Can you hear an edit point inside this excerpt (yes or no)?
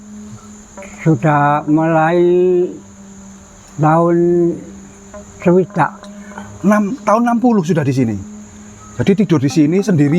no